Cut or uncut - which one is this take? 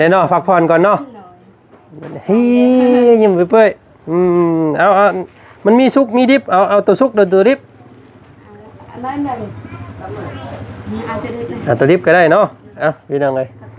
uncut